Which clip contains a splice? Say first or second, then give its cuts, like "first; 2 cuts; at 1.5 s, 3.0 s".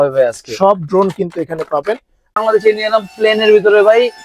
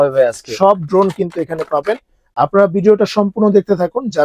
first; 1 cut; at 2.4 s